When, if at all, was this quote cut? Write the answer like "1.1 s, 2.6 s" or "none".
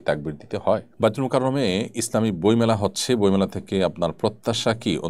0.9 s